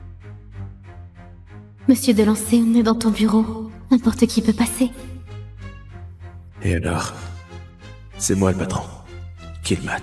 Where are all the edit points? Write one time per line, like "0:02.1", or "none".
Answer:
0:01.9